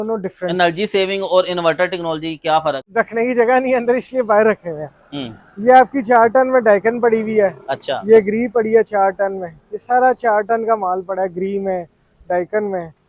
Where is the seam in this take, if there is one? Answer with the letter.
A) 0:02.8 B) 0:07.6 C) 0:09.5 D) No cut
A